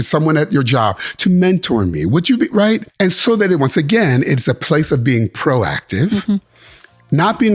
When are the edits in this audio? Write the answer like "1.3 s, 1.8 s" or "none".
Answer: 2.9 s